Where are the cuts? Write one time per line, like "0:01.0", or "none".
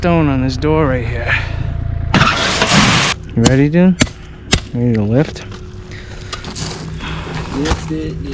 0:02.8